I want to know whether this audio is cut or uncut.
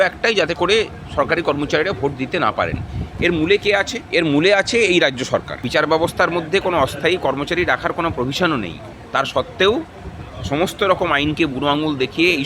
cut